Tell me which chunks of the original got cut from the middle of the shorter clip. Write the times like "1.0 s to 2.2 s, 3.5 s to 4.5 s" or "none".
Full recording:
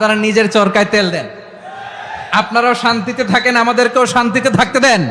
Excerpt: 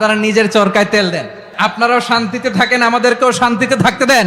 1.4 s to 2.1 s